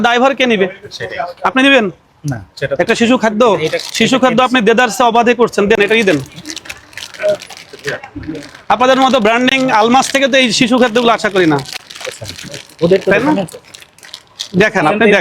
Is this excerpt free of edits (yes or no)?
yes